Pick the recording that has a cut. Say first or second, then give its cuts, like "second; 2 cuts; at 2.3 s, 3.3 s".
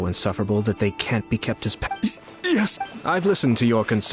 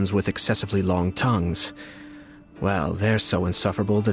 first; 2 cuts; at 1.9 s, 2.9 s